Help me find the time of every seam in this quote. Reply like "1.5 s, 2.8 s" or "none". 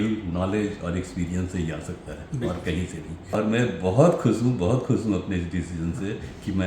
3.2 s